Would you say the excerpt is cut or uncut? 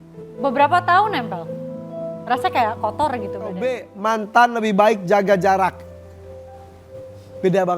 cut